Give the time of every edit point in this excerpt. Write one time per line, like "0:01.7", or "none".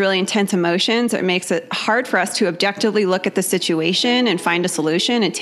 none